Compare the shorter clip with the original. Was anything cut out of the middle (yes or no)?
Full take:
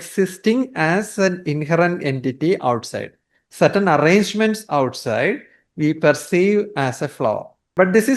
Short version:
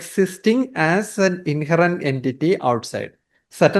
no